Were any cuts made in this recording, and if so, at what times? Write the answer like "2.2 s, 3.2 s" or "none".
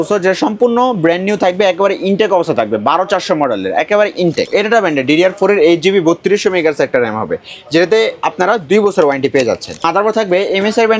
4.5 s, 9.8 s